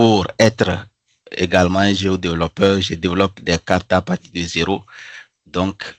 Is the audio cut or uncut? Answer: uncut